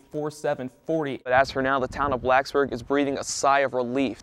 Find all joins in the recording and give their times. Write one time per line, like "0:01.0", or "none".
0:01.3